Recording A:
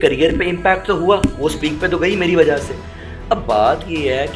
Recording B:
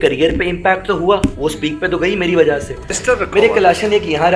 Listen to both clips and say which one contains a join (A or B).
B